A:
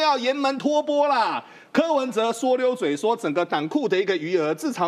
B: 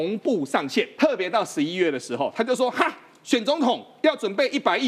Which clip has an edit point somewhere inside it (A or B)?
B